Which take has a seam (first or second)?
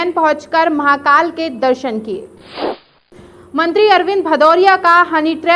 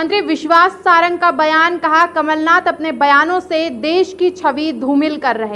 first